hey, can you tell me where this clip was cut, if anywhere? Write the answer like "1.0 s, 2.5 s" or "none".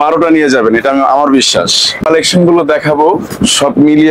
2.0 s